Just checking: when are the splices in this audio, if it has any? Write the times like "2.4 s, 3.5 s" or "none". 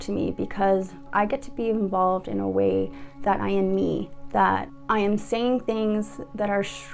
1.0 s